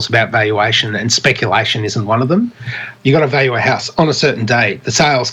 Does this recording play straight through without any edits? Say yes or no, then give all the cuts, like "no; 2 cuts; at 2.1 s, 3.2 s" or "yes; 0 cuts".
no; 1 cut; at 2.8 s